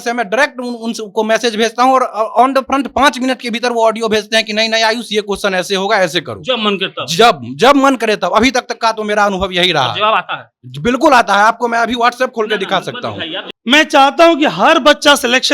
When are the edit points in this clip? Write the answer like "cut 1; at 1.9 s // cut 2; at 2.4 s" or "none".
cut 1; at 13.4 s